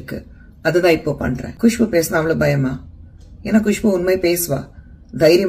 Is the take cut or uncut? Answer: cut